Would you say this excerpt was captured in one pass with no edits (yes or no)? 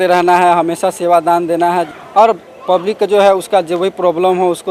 no